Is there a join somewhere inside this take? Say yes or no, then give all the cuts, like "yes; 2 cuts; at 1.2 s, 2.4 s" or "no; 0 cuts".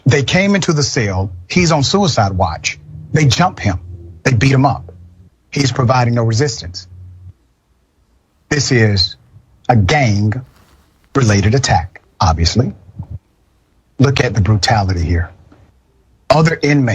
yes; 1 cut; at 1.3 s